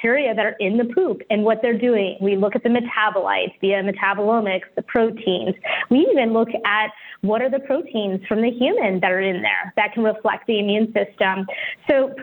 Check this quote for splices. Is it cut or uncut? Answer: uncut